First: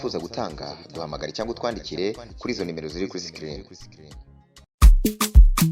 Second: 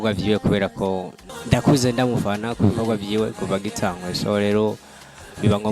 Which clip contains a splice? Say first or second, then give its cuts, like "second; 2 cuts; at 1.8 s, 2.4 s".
second; 1 cut; at 1.3 s